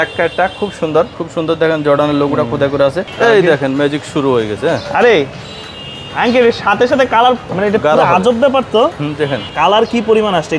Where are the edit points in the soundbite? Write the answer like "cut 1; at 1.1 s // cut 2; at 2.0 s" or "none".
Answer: cut 1; at 1.2 s // cut 2; at 3.1 s // cut 3; at 7.5 s // cut 4; at 9.5 s